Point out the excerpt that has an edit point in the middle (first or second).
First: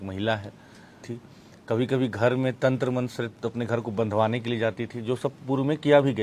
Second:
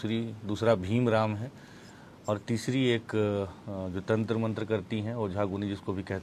first